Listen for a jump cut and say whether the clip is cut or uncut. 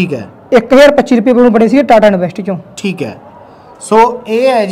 uncut